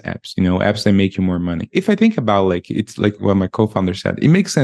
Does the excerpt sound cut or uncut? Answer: cut